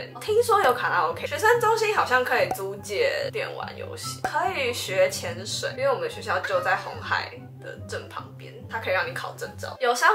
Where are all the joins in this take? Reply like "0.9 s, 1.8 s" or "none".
none